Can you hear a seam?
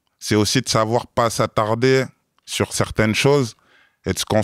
no; 0 cuts

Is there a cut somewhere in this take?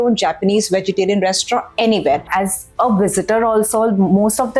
yes; 1 cut; at 2.3 s

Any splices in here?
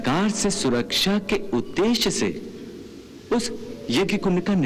no; 0 cuts

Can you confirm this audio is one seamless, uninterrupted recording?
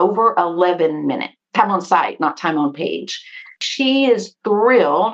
no; 1 cut; at 3.6 s

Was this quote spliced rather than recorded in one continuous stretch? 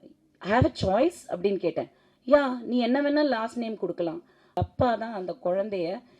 yes; 1 cut; at 4.6 s

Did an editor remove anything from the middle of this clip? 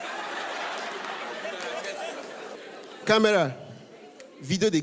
yes; 1 cut; at 2.5 s

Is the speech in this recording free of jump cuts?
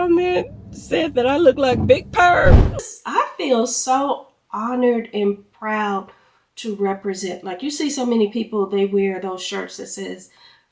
no; 1 cut; at 2.8 s

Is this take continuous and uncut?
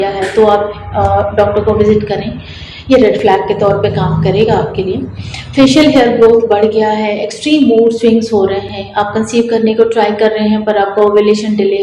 yes; 0 cuts

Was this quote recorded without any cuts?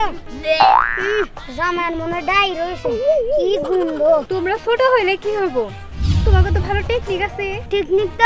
no; 1 cut; at 4.3 s

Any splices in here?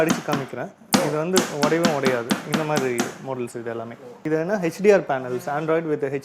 yes; 1 cut; at 4.1 s

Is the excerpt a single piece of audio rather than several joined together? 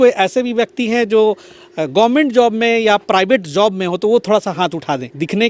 yes; 0 cuts

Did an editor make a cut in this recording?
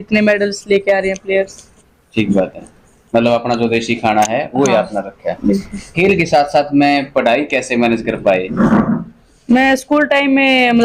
no; 0 cuts

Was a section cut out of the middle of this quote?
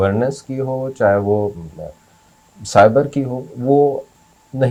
no; 0 cuts

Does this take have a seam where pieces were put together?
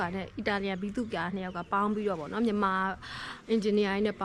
no; 0 cuts

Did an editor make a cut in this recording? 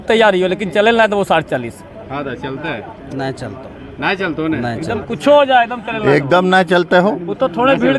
no; 0 cuts

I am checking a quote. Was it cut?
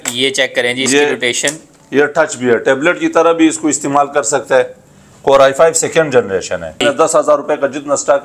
yes; 1 cut; at 6.8 s

